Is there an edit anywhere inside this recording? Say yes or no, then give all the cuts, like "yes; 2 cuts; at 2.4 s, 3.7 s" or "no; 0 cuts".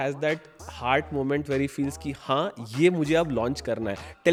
no; 0 cuts